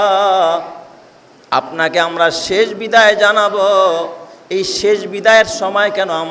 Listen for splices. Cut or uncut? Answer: uncut